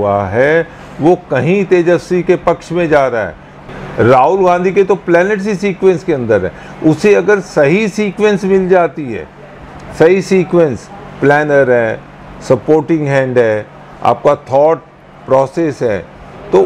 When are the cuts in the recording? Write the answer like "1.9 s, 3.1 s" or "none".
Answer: 3.7 s